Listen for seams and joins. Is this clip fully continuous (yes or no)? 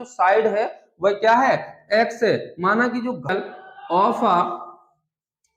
no